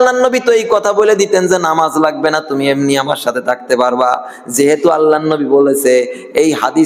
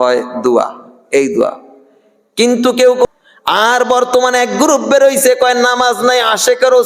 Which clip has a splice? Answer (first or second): second